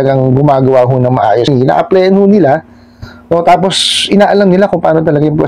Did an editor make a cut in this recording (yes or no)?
yes